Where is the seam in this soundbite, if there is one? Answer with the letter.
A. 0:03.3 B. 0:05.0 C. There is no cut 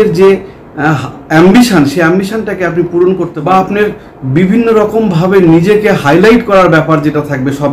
A